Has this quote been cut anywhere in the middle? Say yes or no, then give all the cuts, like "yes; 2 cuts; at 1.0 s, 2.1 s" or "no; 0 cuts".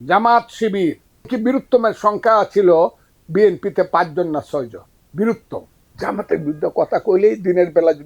yes; 2 cuts; at 1.3 s, 5.9 s